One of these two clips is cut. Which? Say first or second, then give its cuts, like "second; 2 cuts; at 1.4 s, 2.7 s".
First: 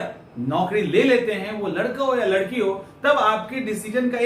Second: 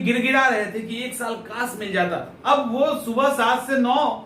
second; 1 cut; at 2.3 s